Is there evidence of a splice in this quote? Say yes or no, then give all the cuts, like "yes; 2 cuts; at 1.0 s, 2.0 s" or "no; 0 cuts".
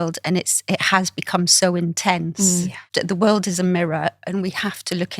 yes; 1 cut; at 2.8 s